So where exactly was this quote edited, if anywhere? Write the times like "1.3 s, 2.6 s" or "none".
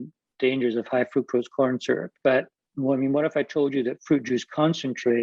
2.1 s